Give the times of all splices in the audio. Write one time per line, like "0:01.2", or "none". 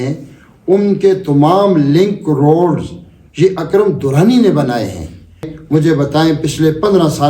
0:05.5